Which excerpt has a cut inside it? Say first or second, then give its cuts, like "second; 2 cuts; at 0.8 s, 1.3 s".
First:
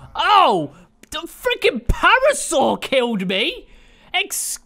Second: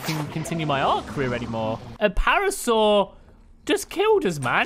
second; 1 cut; at 1.9 s